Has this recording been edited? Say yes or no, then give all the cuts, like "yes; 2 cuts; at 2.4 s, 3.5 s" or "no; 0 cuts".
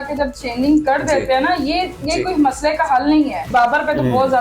yes; 1 cut; at 3.5 s